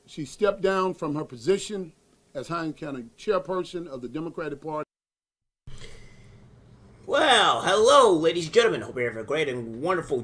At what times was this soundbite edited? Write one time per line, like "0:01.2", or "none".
0:04.8